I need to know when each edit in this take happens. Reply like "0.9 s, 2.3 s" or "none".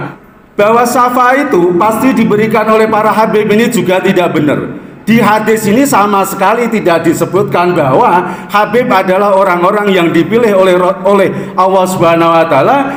none